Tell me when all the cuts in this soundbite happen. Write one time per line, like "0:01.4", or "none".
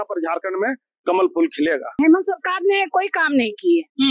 0:02.0